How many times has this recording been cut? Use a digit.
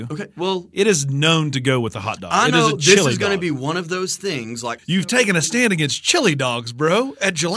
1